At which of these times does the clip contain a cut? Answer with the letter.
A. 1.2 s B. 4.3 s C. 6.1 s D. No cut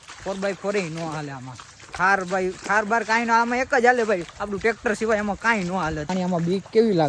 C